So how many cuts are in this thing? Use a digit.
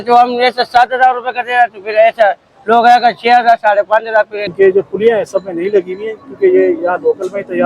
1